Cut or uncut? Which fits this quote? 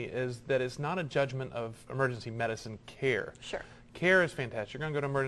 uncut